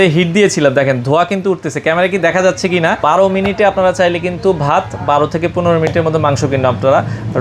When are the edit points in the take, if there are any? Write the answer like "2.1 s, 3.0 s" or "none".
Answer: 3.0 s